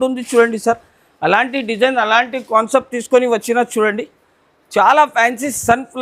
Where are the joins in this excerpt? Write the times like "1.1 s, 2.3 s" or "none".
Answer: none